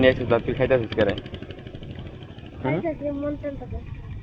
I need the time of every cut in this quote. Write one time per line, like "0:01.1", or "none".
none